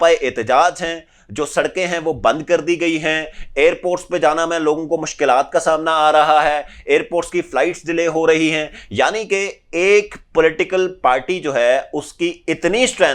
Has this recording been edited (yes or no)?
no